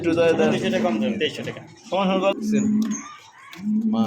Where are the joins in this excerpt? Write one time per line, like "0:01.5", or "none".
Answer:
0:02.3